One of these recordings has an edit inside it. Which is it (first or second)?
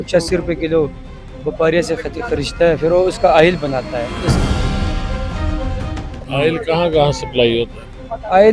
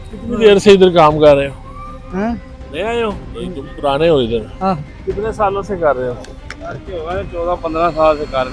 first